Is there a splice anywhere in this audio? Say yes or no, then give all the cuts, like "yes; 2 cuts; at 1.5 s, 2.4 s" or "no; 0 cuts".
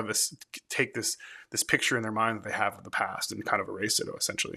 no; 0 cuts